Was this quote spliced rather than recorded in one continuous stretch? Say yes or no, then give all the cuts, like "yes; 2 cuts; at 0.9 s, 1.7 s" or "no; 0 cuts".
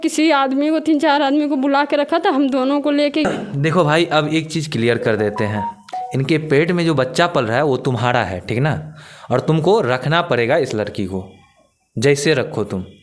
yes; 1 cut; at 3.2 s